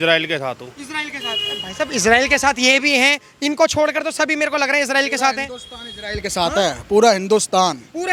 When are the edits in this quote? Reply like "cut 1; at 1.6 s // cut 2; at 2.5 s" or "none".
none